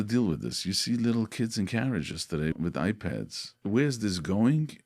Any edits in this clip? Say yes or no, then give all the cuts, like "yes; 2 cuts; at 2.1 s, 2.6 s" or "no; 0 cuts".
yes; 2 cuts; at 2.5 s, 3.5 s